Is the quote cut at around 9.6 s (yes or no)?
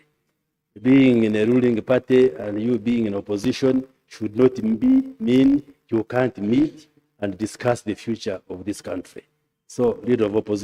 no